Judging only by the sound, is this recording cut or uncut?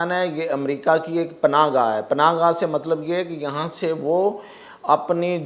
uncut